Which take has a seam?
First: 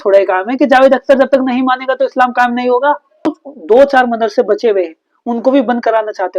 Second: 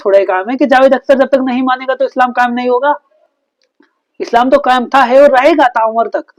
first; 1 cut; at 3.3 s

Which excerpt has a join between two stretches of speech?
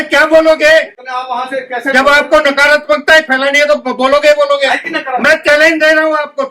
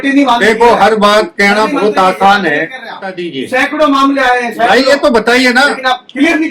second; 1 cut; at 3.3 s

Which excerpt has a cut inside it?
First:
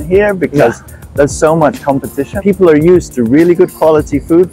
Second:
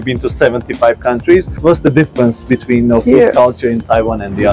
first; 1 cut; at 2.3 s

